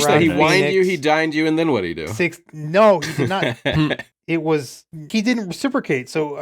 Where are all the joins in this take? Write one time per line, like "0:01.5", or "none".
0:02.0
0:03.5
0:05.1